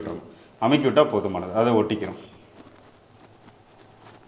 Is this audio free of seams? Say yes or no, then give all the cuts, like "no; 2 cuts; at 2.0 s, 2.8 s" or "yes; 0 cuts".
yes; 0 cuts